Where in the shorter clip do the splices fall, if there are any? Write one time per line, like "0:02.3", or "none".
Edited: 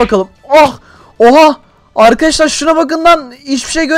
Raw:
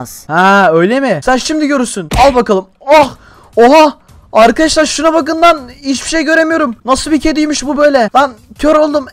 none